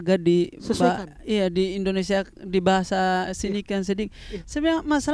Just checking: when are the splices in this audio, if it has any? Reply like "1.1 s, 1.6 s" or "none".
none